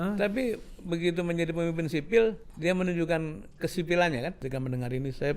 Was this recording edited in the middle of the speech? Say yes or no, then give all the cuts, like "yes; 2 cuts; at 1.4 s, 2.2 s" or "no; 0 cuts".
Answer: yes; 2 cuts; at 2.5 s, 4.4 s